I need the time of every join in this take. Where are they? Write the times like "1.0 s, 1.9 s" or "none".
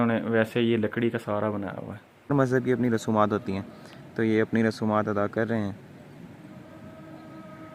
2.3 s